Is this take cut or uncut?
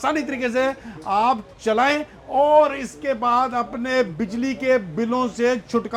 uncut